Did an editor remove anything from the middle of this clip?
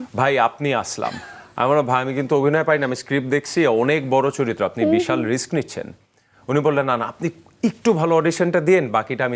no; 0 cuts

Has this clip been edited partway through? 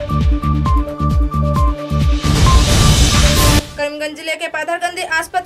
yes; 1 cut; at 3.6 s

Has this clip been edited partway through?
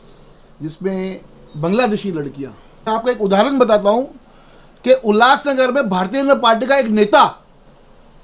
yes; 1 cut; at 2.9 s

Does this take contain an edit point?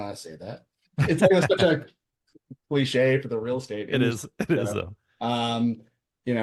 no; 0 cuts

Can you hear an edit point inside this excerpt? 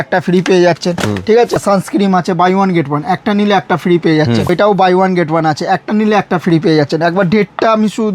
yes; 2 cuts; at 1.6 s, 4.5 s

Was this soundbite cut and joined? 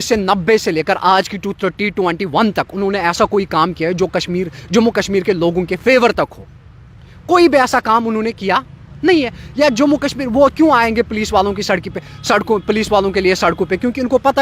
no; 0 cuts

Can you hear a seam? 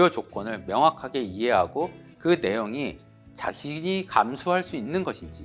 no; 0 cuts

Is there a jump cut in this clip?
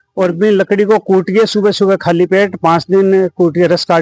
no; 0 cuts

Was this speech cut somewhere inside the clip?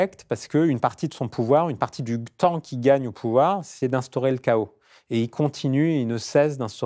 no; 0 cuts

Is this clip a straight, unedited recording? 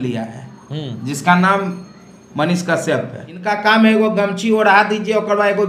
no; 1 cut; at 3.5 s

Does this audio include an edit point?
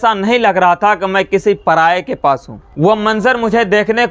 yes; 1 cut; at 2.6 s

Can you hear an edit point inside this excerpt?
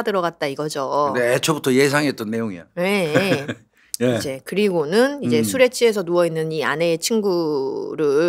no; 0 cuts

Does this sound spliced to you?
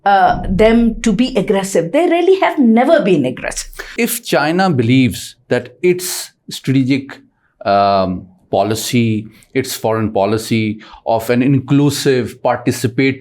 yes; 1 cut; at 3.9 s

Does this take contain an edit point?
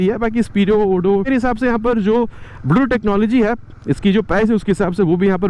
yes; 1 cut; at 1.3 s

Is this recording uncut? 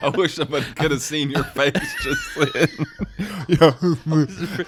yes; 0 cuts

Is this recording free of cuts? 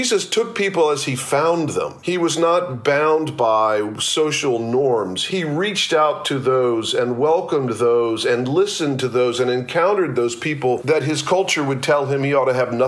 no; 3 cuts; at 2.0 s, 5.2 s, 10.8 s

